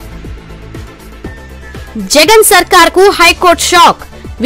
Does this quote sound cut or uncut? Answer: cut